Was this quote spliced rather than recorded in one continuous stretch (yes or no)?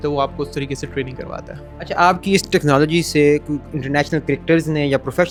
no